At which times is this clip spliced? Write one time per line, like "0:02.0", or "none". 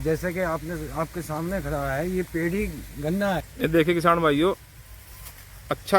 0:03.5